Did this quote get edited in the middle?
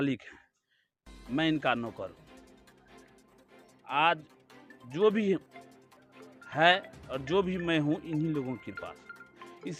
no; 0 cuts

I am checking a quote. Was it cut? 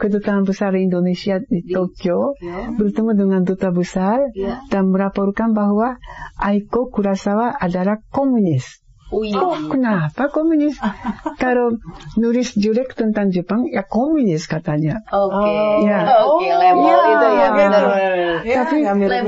no; 0 cuts

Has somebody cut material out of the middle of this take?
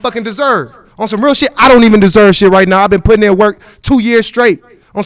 no; 0 cuts

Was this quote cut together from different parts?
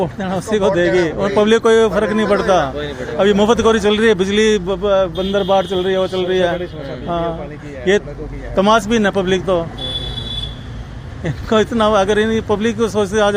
no; 0 cuts

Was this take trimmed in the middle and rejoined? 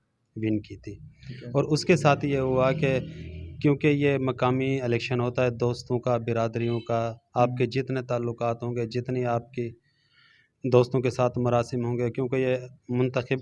no; 0 cuts

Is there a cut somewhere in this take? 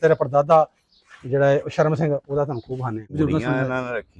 yes; 1 cut; at 3.0 s

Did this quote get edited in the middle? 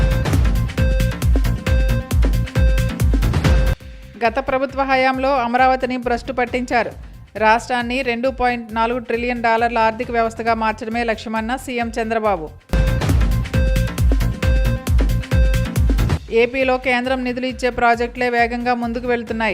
yes; 1 cut; at 3.4 s

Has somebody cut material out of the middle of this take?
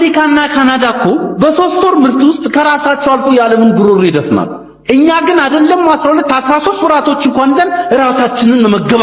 no; 0 cuts

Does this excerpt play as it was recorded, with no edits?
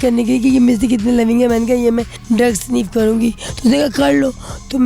no; 2 cuts; at 2.1 s, 3.5 s

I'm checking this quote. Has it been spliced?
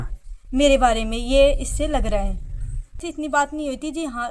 yes; 1 cut; at 3.0 s

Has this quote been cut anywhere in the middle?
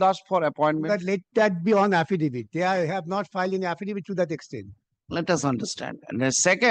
no; 0 cuts

